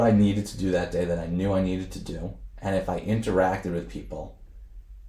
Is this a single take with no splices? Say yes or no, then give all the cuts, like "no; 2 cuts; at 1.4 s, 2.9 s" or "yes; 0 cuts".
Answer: yes; 0 cuts